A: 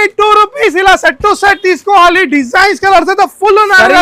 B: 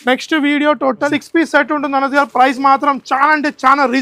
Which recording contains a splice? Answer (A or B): B